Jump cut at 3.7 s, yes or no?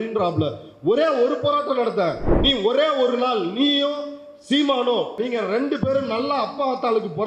no